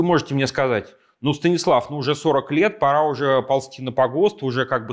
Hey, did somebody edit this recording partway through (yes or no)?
no